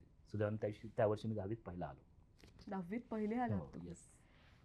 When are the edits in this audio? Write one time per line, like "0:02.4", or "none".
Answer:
none